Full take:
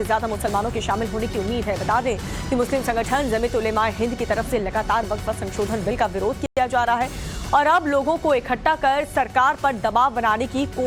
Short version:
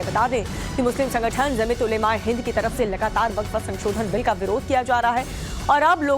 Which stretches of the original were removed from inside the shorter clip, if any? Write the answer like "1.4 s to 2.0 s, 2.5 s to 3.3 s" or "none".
6.4 s to 6.5 s